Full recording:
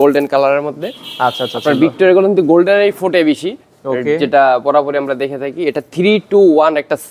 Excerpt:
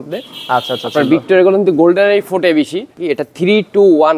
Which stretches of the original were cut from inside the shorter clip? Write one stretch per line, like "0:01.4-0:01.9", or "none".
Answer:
0:03.6-0:05.5